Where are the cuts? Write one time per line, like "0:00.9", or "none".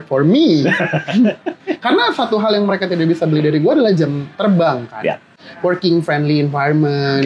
0:05.8